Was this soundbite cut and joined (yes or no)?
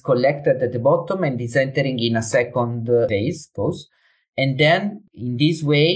yes